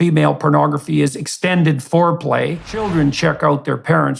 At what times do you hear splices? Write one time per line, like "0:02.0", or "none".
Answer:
0:02.9